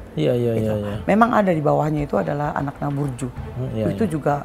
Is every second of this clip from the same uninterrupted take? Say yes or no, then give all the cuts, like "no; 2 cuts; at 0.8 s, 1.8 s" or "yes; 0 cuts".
yes; 0 cuts